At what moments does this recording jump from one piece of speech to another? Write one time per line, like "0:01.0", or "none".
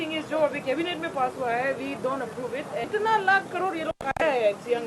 0:02.9